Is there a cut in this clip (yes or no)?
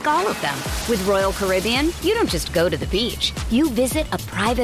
no